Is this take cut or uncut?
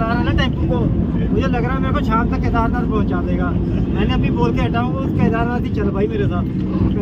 uncut